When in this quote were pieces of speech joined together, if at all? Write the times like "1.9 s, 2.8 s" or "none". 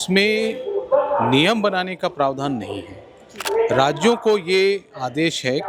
3.4 s